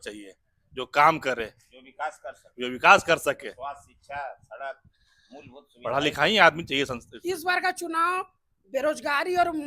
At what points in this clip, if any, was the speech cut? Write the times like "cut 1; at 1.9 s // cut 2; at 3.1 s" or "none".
none